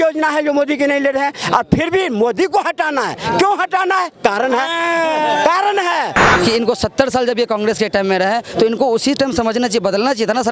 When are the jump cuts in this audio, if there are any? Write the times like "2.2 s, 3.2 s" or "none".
6.3 s